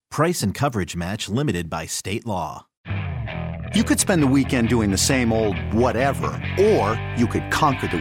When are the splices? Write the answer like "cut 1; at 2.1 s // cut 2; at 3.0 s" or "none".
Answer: cut 1; at 2.7 s